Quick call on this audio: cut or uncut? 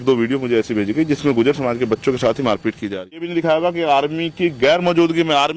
cut